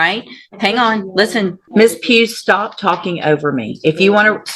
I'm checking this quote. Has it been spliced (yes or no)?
yes